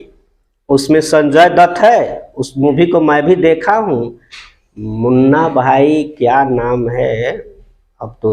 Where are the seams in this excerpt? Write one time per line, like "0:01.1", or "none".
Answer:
none